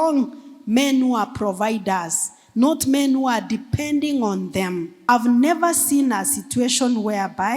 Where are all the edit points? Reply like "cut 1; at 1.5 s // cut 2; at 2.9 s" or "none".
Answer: cut 1; at 5.0 s